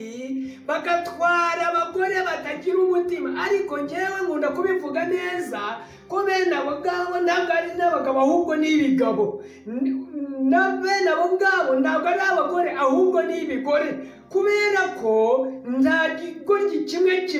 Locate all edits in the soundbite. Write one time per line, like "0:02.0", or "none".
none